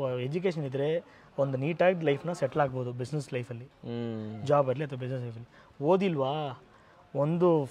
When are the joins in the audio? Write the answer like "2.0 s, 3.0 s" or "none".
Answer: none